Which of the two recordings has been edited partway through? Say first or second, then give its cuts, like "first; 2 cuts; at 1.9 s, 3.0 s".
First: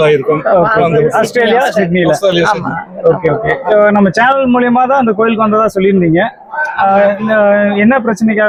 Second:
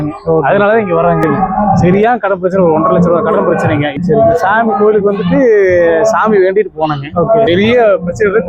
second; 3 cuts; at 1.3 s, 3.9 s, 7.5 s